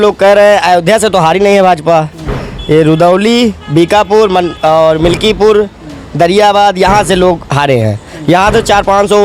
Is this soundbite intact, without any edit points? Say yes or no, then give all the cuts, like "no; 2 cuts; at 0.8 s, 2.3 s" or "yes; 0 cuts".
yes; 0 cuts